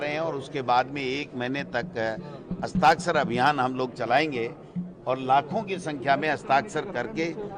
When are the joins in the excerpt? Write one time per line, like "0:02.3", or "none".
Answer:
none